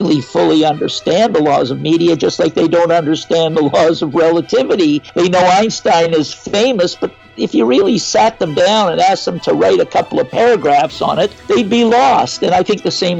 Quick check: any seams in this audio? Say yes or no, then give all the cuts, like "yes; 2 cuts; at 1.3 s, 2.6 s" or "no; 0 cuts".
yes; 2 cuts; at 5.1 s, 11.4 s